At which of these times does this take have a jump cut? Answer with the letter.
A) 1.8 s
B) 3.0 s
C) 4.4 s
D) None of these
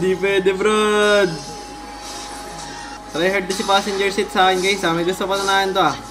B